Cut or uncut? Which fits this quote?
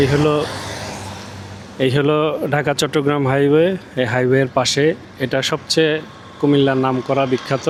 uncut